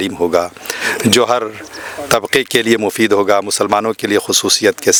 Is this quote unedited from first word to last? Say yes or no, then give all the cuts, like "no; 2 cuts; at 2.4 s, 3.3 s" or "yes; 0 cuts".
yes; 0 cuts